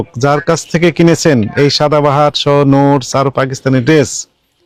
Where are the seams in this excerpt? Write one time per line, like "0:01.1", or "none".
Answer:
none